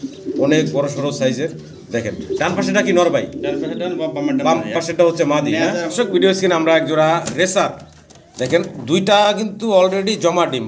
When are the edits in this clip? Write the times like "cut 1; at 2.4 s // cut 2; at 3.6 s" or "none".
cut 1; at 5.9 s